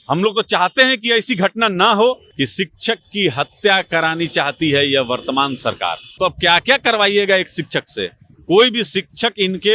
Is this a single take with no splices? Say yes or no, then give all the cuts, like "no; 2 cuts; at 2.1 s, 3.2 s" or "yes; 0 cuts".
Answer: no; 2 cuts; at 2.3 s, 6.1 s